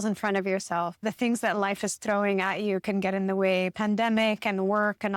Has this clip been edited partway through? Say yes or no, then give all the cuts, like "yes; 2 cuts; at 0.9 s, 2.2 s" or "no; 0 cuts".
yes; 1 cut; at 1.0 s